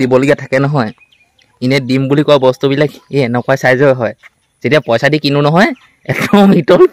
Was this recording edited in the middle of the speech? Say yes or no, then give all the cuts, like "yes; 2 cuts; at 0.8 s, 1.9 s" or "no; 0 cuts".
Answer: no; 0 cuts